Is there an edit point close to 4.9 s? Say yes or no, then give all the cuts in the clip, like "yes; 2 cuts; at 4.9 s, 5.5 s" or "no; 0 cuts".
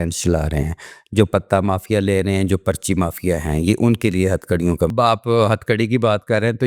yes; 1 cut; at 4.9 s